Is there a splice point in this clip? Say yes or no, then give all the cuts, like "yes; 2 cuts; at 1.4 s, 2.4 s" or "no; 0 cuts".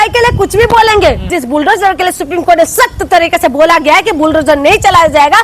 yes; 1 cut; at 1.3 s